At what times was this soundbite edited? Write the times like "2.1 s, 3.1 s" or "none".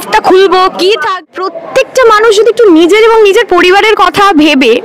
1.2 s